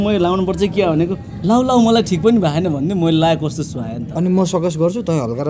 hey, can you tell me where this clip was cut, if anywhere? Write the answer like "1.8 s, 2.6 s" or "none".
4.0 s